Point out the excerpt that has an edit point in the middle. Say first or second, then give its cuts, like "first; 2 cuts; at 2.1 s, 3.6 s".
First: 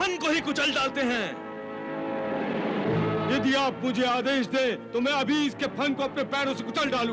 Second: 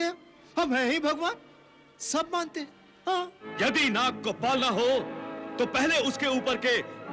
second; 1 cut; at 3.5 s